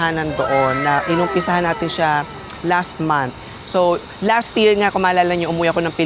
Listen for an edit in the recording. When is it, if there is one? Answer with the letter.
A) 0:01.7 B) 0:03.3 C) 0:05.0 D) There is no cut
D